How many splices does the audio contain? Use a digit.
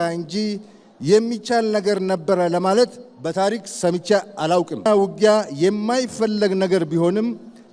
1